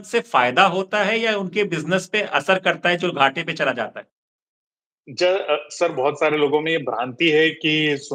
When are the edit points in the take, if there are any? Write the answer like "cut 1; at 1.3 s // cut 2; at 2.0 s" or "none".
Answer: none